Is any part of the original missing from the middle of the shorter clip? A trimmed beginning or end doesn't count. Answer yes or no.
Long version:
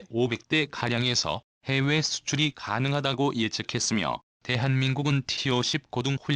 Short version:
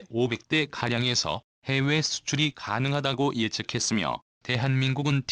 no